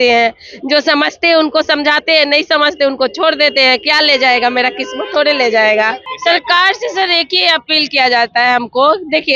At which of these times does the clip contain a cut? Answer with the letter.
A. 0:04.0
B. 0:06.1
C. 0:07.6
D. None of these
B